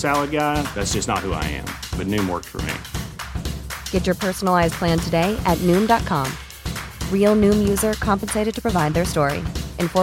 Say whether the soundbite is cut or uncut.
uncut